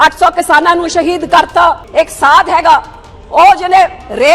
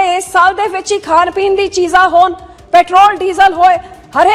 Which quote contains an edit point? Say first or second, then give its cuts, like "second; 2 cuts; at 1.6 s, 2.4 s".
first; 1 cut; at 1.8 s